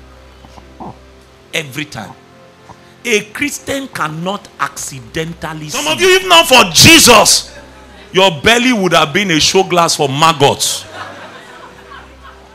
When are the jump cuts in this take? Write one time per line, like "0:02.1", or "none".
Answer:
0:05.9